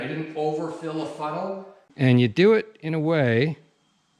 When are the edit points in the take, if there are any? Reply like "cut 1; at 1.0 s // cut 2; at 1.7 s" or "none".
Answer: cut 1; at 1.8 s